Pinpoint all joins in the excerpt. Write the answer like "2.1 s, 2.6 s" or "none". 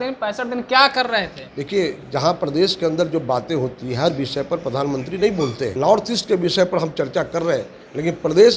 5.7 s